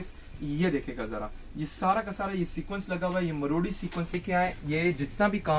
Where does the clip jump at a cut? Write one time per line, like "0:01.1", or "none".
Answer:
0:04.1